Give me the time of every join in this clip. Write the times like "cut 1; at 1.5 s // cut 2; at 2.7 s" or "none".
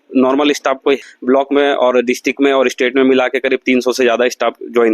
cut 1; at 1.1 s